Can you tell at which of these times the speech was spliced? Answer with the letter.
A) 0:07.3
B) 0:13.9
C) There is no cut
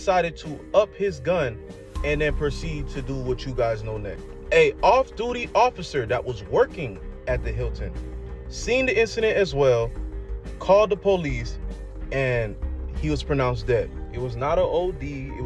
C